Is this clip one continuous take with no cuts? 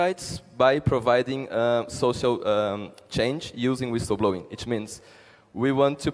yes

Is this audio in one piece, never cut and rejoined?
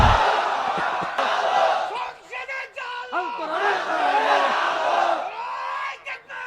no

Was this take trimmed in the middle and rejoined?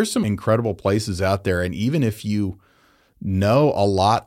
no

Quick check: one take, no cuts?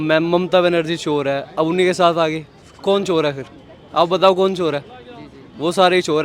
yes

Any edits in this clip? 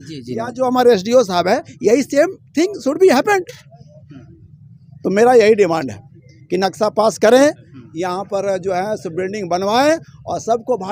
no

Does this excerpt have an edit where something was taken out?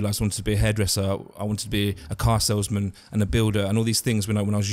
no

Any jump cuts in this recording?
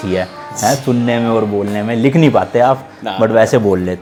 no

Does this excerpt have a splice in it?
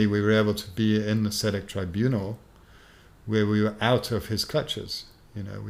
no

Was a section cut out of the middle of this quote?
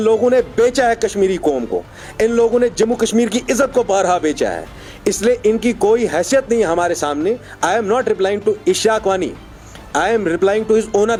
no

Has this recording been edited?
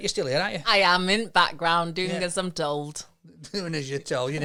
no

